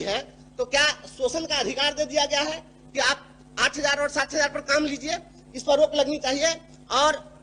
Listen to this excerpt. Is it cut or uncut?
uncut